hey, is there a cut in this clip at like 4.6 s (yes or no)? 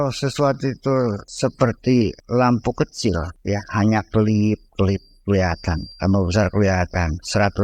no